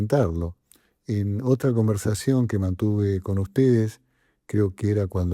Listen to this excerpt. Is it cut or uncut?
uncut